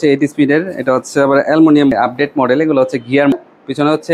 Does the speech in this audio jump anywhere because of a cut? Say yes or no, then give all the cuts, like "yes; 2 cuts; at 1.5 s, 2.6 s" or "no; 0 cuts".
yes; 2 cuts; at 1.9 s, 3.4 s